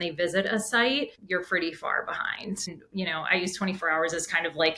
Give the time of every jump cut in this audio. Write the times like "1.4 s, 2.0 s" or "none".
1.2 s, 2.7 s